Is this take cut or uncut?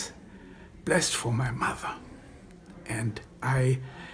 uncut